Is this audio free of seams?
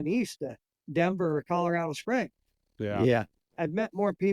no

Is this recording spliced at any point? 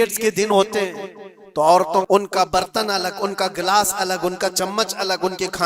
yes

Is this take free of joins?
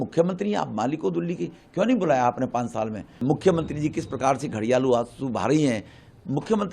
no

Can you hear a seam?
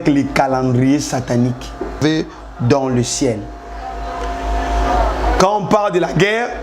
yes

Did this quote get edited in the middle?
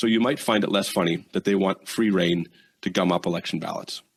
no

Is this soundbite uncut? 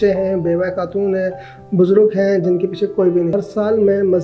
no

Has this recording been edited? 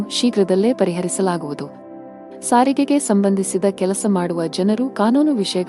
yes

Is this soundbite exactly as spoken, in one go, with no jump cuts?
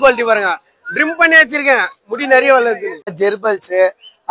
no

